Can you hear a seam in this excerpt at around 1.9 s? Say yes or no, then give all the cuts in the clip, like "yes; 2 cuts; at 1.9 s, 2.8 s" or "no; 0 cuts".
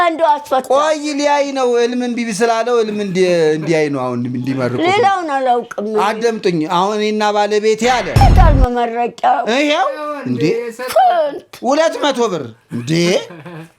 no; 1 cut; at 8.2 s